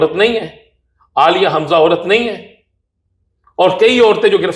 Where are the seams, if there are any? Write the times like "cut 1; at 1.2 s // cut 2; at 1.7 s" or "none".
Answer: none